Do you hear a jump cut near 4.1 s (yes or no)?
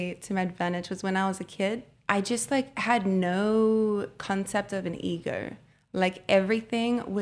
no